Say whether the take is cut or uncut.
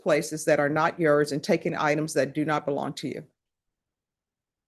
uncut